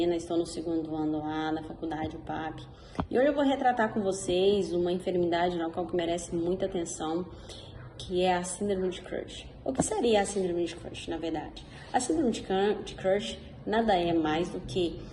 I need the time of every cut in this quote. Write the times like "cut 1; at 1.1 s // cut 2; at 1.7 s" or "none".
none

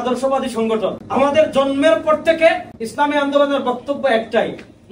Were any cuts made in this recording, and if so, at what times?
cut 1; at 1.0 s // cut 2; at 2.8 s

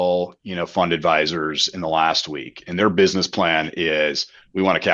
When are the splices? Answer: none

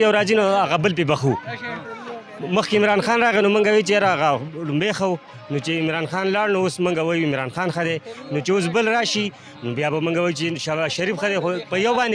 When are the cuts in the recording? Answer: none

